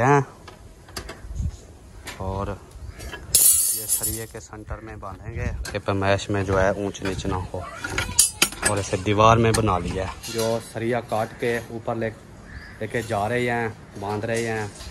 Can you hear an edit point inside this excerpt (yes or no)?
yes